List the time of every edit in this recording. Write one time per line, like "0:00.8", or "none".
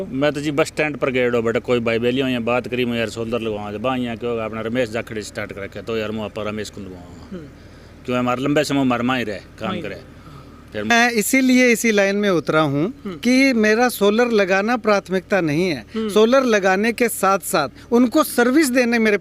0:10.9